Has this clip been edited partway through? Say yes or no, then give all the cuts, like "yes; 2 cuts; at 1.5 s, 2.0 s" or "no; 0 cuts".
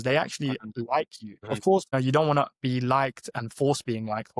yes; 1 cut; at 1.3 s